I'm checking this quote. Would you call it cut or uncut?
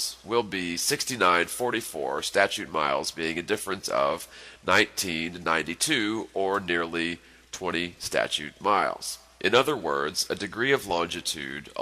cut